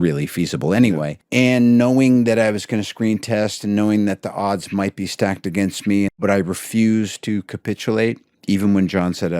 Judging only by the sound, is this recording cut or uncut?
cut